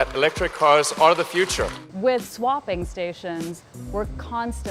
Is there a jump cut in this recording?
yes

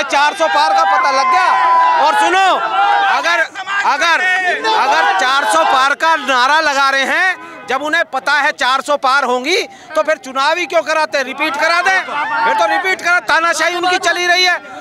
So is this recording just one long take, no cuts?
yes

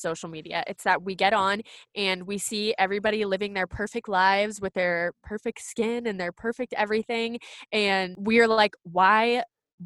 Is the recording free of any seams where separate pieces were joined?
no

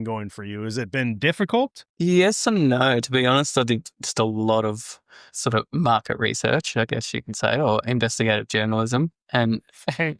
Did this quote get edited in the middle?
yes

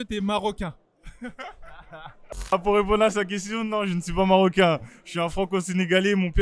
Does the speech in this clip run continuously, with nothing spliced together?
no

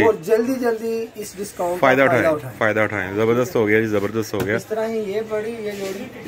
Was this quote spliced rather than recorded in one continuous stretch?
no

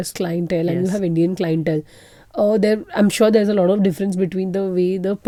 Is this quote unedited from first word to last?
yes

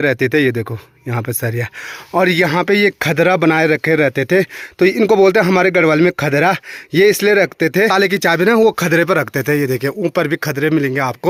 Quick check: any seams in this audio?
no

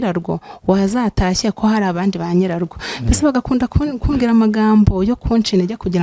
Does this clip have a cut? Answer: no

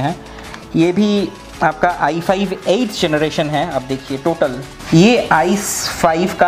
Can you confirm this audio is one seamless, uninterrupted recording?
no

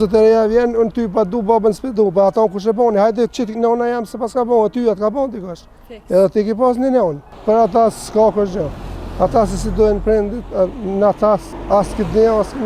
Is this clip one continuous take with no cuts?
no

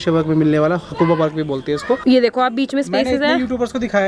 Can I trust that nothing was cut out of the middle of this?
no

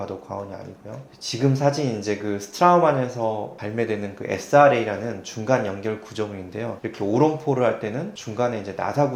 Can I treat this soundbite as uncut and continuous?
yes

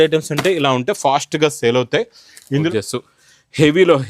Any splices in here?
yes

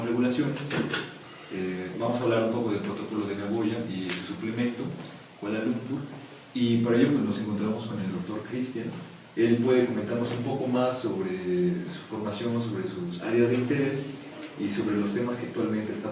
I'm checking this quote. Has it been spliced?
yes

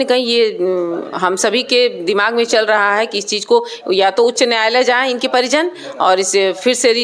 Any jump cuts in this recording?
no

